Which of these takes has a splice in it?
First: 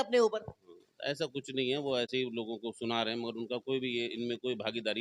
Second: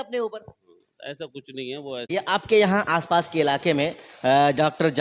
second; 1 cut; at 2.1 s

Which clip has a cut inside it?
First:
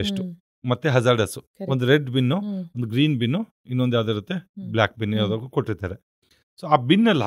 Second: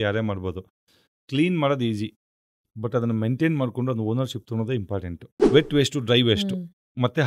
second; 1 cut; at 5.3 s

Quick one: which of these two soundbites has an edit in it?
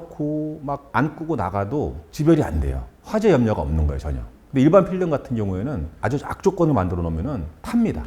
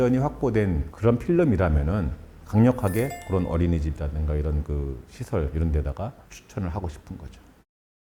first; 1 cut; at 6.0 s

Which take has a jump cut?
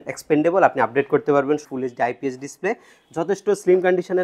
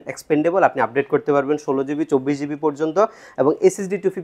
first; 1 cut; at 1.6 s

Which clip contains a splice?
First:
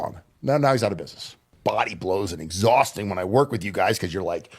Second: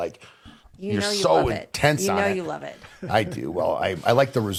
first; 1 cut; at 1.5 s

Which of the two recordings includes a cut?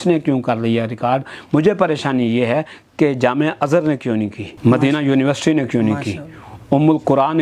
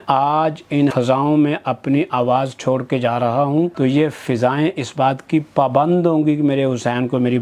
second; 2 cuts; at 0.9 s, 3.7 s

